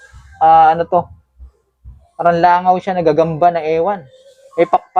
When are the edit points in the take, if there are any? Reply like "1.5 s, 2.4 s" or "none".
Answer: none